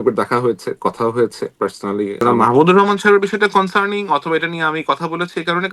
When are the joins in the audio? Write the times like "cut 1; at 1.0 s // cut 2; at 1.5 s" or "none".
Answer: cut 1; at 2.2 s